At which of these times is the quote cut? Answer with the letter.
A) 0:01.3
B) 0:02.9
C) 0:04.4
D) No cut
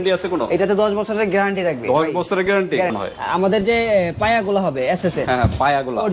B